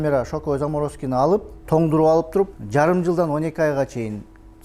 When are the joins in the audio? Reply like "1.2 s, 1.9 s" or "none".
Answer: 1.5 s, 2.6 s